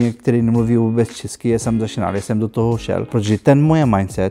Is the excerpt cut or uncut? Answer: cut